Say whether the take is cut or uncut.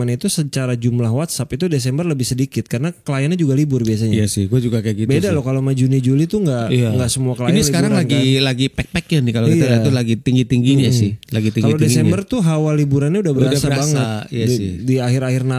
uncut